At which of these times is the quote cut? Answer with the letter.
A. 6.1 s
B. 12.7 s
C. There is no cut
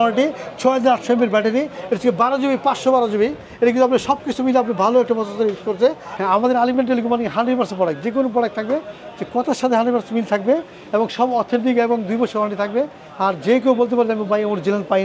A